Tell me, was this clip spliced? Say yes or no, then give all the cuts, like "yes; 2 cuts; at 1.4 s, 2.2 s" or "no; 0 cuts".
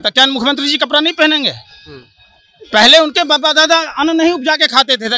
no; 0 cuts